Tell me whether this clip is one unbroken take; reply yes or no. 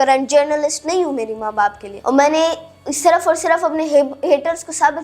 no